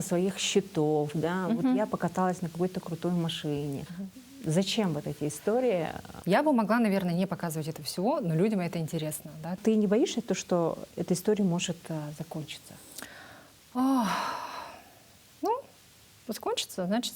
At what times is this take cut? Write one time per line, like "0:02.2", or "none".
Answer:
0:03.9
0:06.1
0:09.5